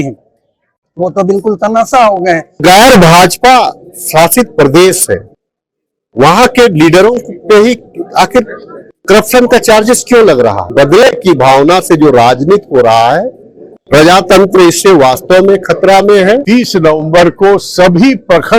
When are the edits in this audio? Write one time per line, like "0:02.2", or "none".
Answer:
0:02.6
0:10.7
0:16.4